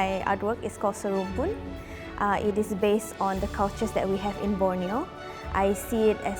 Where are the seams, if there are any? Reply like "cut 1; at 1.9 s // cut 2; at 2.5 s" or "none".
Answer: none